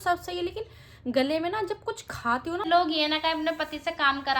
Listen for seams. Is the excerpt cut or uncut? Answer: cut